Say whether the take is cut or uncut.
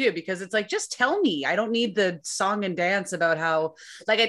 uncut